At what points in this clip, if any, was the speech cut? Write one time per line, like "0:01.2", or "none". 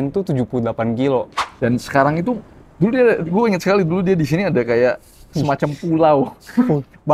0:01.4